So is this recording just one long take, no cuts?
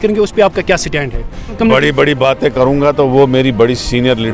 no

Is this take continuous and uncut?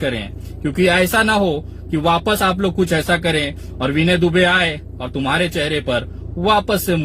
yes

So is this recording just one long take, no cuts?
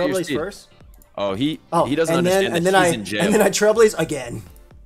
yes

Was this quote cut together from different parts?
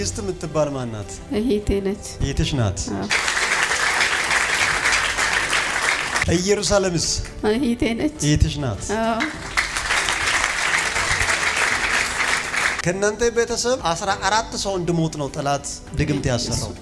no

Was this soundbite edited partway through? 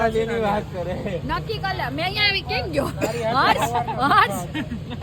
no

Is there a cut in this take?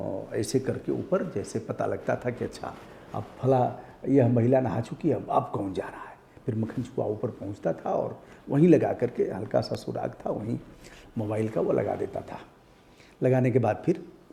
no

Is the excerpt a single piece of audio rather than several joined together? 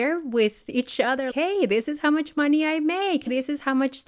no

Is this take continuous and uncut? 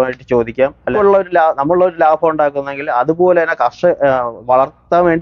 no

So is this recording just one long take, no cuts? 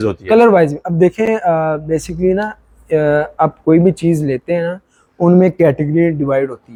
yes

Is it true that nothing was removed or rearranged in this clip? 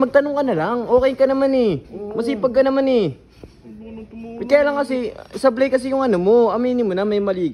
yes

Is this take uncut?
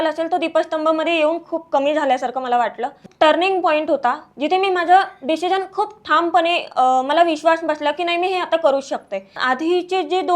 no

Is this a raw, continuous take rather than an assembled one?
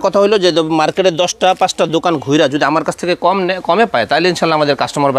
yes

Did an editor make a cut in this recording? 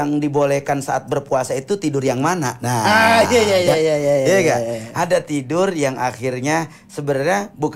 no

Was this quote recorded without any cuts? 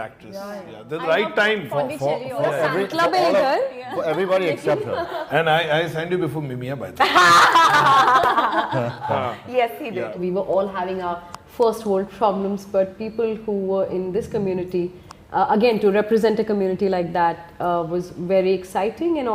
no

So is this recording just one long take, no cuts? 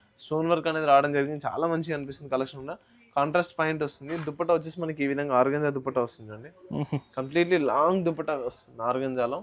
yes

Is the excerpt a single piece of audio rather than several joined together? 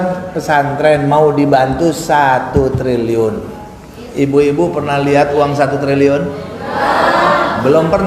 yes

